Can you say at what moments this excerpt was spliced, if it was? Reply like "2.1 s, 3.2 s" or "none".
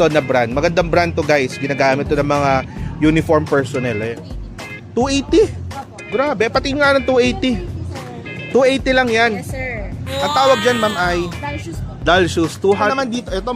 4.2 s, 12.7 s

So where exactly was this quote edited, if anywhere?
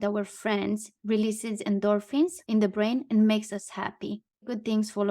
0.9 s, 4.4 s

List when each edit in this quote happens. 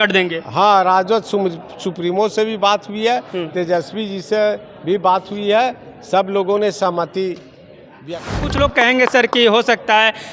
8.0 s

